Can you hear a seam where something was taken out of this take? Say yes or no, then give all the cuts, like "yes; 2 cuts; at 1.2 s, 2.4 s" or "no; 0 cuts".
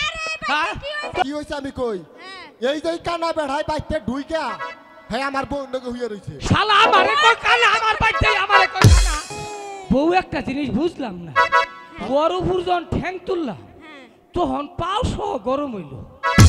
yes; 2 cuts; at 1.2 s, 9.3 s